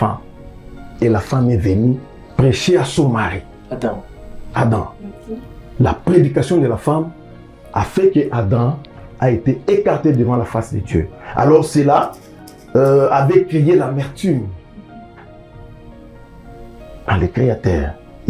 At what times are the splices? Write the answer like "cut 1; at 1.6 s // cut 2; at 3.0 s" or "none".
none

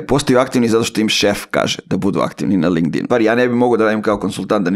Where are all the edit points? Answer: cut 1; at 3.0 s

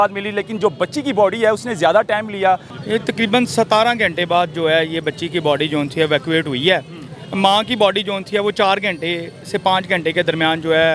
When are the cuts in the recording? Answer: cut 1; at 2.7 s

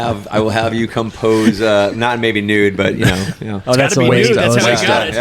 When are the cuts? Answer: cut 1; at 3.5 s

